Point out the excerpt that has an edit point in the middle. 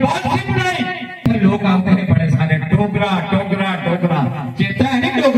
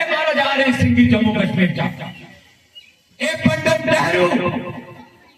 first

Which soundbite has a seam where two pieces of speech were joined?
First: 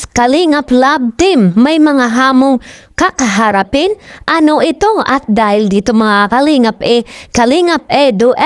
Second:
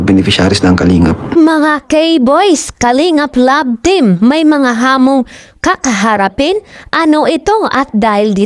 second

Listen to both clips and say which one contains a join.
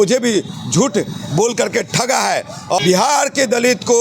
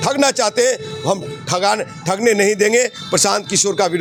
first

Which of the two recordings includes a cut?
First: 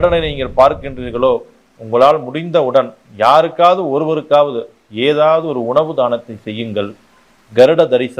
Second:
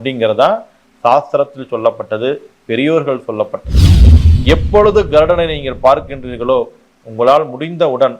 second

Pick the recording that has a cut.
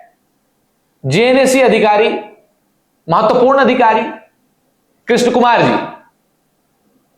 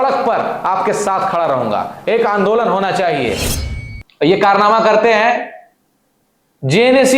second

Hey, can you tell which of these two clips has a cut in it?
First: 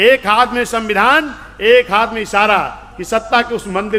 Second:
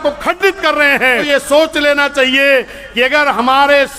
second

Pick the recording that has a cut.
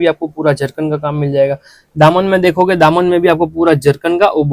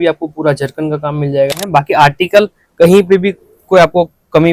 second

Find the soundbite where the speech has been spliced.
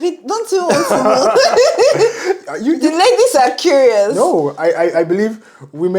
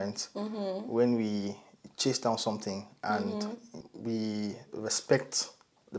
second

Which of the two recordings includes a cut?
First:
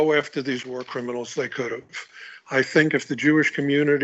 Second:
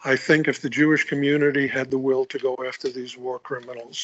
second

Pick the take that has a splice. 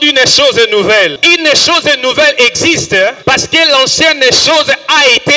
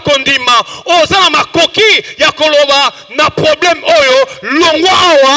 first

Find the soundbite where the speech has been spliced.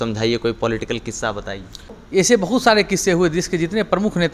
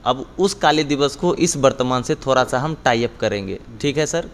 first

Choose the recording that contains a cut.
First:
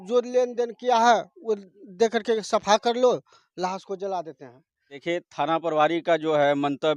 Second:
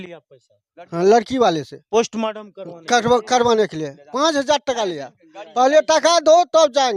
first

